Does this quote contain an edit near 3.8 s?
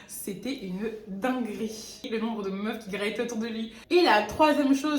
yes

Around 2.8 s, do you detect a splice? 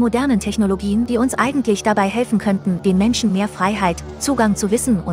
yes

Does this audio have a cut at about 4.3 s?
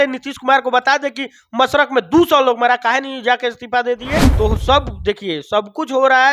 yes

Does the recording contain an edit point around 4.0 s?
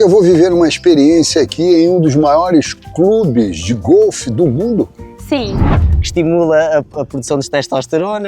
no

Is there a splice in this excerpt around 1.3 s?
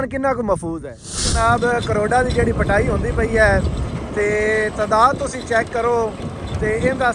yes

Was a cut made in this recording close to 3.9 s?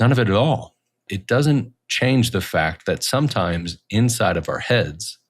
no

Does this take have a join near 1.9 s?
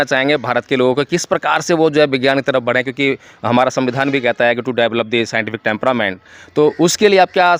no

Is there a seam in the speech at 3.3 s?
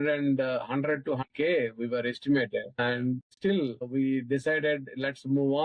yes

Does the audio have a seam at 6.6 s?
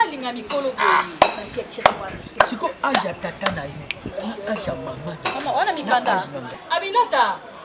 yes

